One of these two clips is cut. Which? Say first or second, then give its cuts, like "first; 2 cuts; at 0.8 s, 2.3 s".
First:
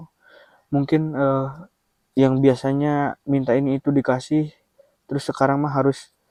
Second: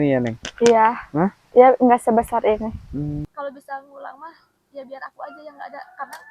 second; 1 cut; at 3.2 s